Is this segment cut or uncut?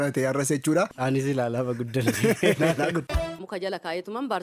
cut